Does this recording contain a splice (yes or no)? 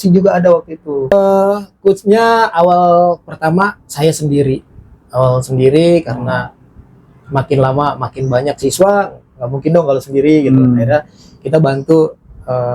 yes